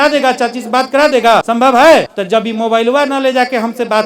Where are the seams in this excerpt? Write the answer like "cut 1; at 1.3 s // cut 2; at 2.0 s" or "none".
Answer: cut 1; at 1.5 s // cut 2; at 2.1 s